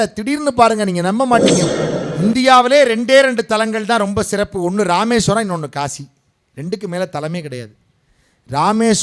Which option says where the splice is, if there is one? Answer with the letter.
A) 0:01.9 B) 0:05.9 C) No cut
A